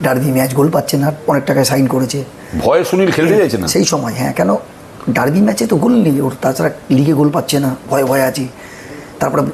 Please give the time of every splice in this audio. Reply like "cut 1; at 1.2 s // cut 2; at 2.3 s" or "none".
none

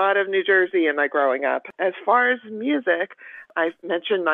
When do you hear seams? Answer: cut 1; at 1.7 s // cut 2; at 3.5 s

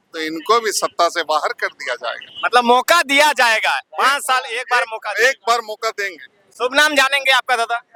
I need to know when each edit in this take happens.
none

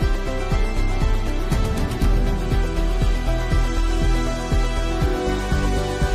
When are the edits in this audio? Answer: none

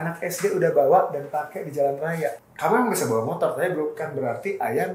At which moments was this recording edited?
cut 1; at 2.4 s

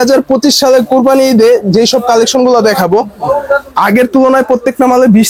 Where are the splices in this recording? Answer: none

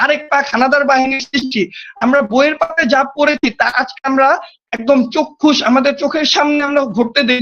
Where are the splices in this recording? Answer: none

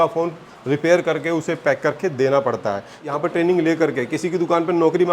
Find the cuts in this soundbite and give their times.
cut 1; at 3.0 s

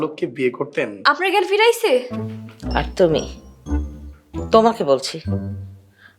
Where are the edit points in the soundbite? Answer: cut 1; at 0.9 s

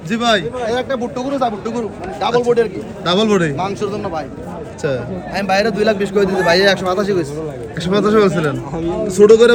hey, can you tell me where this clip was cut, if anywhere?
none

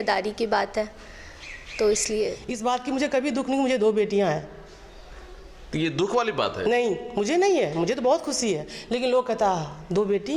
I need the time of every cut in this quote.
cut 1; at 2.5 s

